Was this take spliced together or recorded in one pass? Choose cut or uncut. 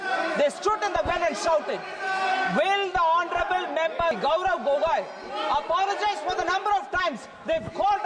cut